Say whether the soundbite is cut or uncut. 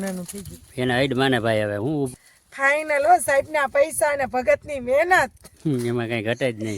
cut